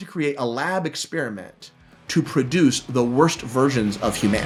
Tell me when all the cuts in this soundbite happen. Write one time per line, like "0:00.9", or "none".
none